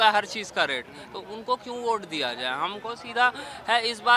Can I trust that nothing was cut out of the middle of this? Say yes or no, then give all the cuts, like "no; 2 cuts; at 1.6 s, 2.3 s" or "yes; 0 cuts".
yes; 0 cuts